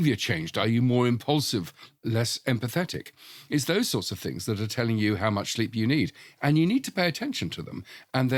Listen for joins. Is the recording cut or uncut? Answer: uncut